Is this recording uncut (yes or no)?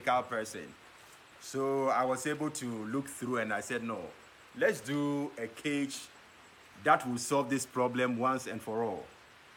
yes